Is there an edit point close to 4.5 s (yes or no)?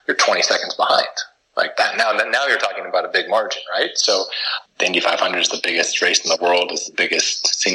yes